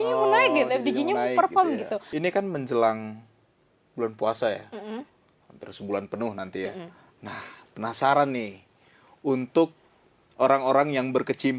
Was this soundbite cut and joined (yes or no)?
yes